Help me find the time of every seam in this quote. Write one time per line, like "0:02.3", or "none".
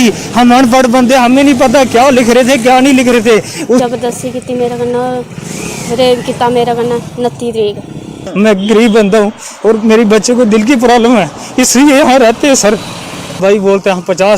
0:03.8
0:08.2
0:13.4